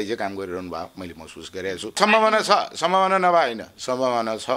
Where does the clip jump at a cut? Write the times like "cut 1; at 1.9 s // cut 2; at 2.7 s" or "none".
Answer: cut 1; at 2.0 s